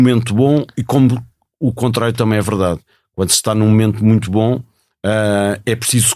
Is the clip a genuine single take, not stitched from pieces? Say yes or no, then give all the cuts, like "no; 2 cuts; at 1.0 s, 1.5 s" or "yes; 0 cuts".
yes; 0 cuts